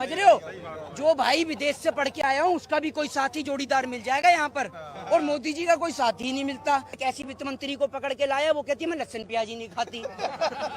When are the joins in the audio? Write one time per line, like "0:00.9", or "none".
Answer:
0:07.0